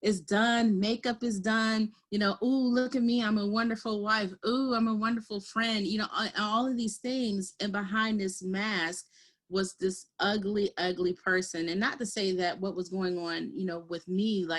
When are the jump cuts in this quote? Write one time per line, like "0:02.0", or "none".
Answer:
none

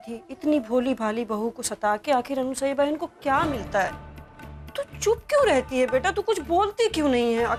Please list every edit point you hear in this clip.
none

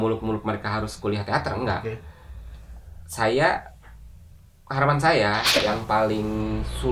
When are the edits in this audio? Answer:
0:05.6

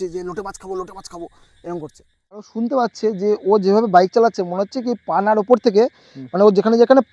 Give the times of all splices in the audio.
0:02.5

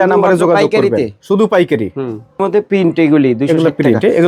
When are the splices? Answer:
none

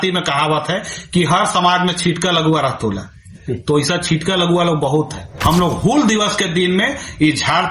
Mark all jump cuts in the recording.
0:05.3

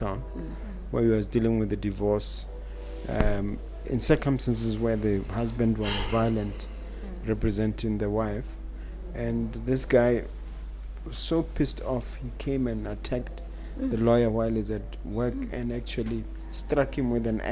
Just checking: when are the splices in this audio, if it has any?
none

